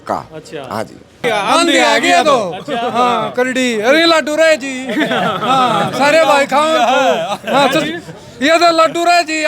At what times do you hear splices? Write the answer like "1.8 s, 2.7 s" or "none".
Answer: 1.2 s